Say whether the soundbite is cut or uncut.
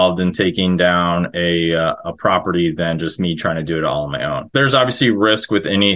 cut